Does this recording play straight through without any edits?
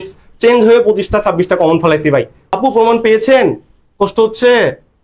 no; 1 cut; at 2.4 s

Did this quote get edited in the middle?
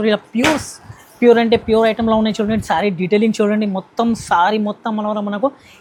no; 0 cuts

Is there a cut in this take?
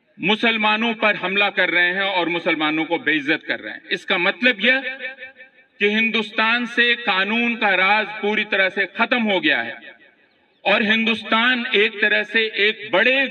no; 0 cuts

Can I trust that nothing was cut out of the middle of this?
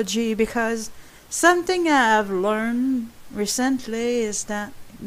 yes; 0 cuts

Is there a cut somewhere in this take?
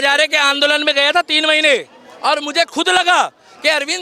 no; 0 cuts

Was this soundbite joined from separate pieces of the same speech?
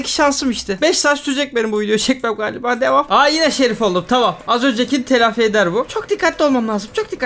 no; 0 cuts

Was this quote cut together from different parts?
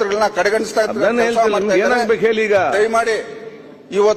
no; 0 cuts

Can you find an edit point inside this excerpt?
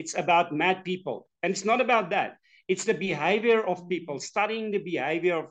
no; 0 cuts

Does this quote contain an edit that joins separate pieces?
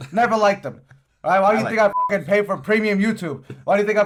no; 0 cuts

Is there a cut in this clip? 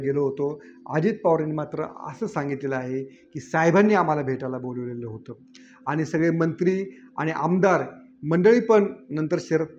no; 0 cuts

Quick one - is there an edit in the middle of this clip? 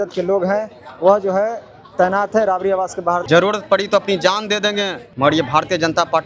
yes; 2 cuts; at 3.2 s, 5.0 s

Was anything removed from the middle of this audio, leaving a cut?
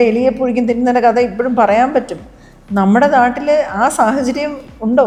no; 0 cuts

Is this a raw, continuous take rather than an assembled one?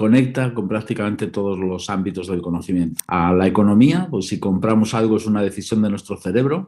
no; 1 cut; at 3.0 s

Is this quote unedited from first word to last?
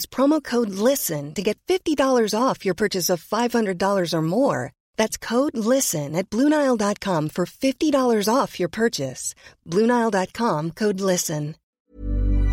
no; 1 cut; at 11.6 s

